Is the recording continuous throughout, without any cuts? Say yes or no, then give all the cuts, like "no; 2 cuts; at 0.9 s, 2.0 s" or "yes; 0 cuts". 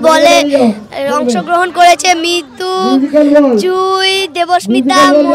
yes; 0 cuts